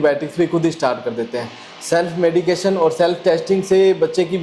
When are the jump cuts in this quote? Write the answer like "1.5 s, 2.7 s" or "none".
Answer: none